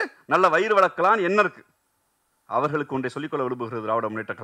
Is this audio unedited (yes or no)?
yes